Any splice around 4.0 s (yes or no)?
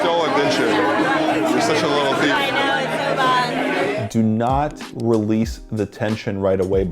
yes